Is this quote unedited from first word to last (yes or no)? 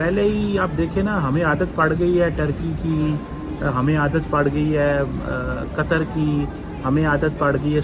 yes